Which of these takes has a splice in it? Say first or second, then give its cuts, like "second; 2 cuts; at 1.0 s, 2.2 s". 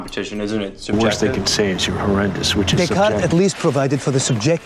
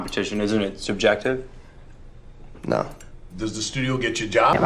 first; 2 cuts; at 0.9 s, 2.8 s